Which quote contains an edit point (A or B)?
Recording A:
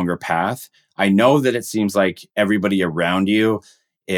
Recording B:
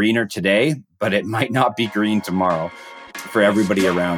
B